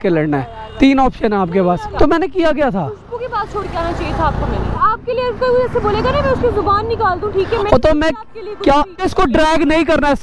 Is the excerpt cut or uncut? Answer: cut